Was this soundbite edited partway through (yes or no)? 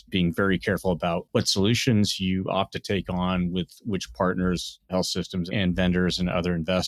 yes